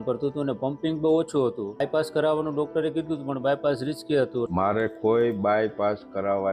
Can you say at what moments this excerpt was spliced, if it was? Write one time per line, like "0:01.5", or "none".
0:04.5